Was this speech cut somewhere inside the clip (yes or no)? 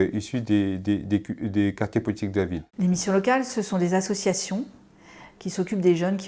yes